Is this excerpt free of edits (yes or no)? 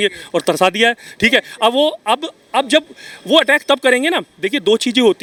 yes